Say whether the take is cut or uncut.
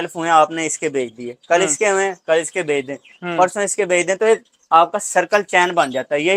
uncut